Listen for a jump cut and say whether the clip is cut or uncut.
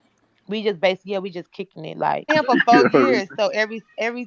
cut